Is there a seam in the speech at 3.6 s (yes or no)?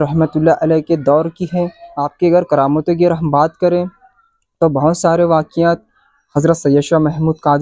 no